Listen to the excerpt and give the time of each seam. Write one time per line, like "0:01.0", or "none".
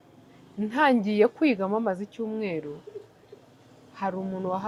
none